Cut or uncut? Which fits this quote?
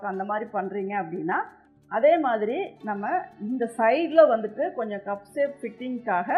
cut